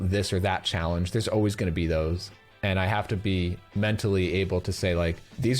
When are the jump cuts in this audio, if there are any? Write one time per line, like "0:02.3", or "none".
0:02.3